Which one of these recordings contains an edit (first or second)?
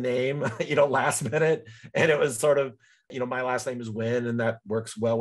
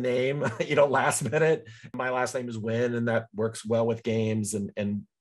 second